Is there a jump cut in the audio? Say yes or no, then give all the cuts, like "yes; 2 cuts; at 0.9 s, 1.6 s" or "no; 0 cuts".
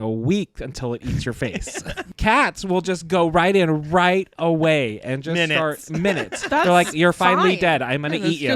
yes; 1 cut; at 2.1 s